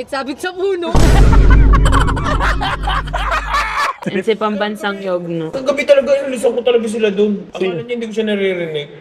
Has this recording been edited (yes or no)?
yes